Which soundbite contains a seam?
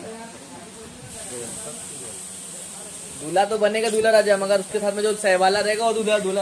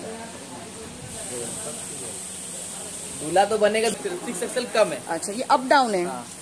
second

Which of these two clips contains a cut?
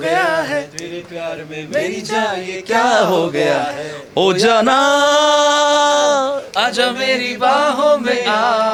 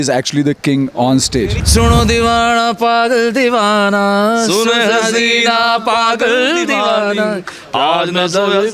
second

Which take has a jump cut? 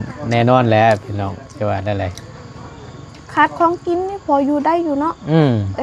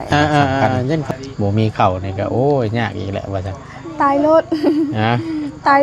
second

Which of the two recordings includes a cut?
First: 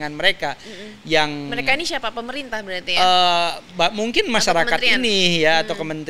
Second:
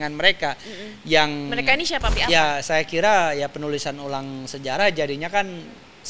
second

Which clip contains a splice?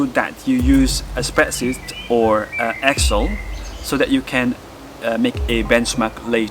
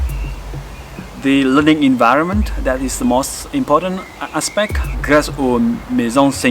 second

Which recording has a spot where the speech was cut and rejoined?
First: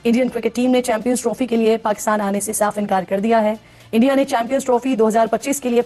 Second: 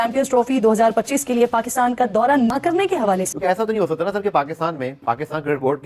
second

